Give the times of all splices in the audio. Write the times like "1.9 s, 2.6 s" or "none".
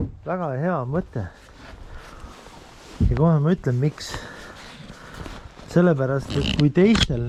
none